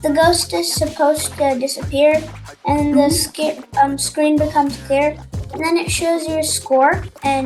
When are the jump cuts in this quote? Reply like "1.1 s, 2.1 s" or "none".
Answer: none